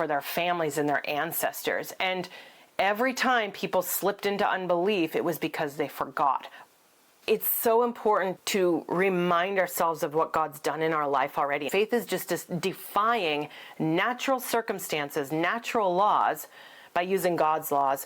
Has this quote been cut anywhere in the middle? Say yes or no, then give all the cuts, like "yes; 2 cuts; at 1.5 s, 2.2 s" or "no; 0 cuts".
yes; 2 cuts; at 7.1 s, 11.7 s